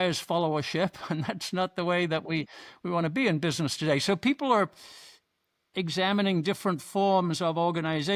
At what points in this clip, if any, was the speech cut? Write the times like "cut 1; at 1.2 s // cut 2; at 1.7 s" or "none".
none